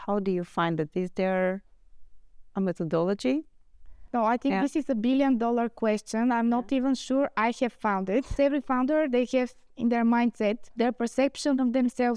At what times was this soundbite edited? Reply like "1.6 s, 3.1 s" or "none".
4.1 s, 8.3 s, 10.7 s